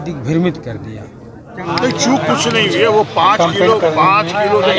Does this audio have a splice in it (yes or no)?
yes